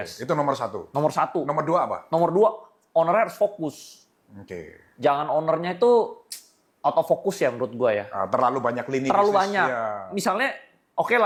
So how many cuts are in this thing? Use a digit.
0